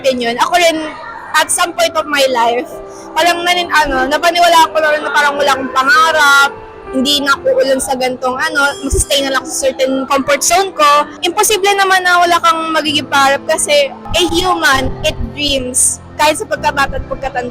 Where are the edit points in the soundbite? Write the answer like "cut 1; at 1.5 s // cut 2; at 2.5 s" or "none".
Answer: cut 1; at 10.0 s // cut 2; at 11.2 s // cut 3; at 14.0 s